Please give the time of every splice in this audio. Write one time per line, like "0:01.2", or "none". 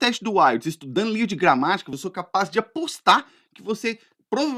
0:02.0